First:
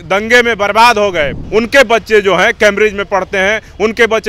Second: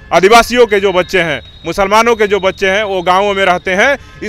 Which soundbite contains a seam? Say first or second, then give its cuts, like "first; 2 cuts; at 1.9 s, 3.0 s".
first; 1 cut; at 1.4 s